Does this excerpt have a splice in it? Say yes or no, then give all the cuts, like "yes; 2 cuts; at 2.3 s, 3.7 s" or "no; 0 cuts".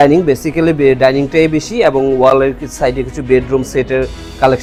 no; 0 cuts